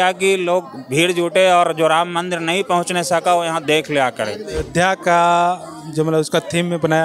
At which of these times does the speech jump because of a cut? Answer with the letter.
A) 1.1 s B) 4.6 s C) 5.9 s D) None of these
B